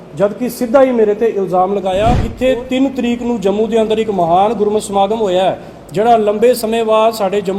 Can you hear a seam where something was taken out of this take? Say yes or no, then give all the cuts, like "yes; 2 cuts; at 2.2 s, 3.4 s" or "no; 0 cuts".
yes; 1 cut; at 2.3 s